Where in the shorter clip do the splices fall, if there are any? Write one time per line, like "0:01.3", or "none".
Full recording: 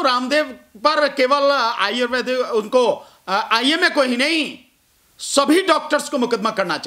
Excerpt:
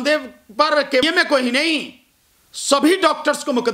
0:01.0